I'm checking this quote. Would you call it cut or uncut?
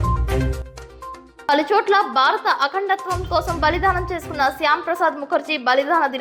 cut